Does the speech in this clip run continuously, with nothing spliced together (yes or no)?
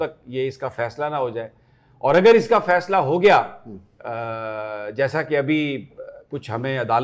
yes